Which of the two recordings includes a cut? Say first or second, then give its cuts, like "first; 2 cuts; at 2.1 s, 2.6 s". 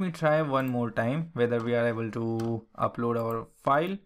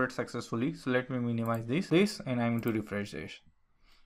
second; 1 cut; at 1.9 s